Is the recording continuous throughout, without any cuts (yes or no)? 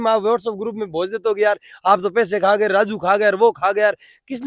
yes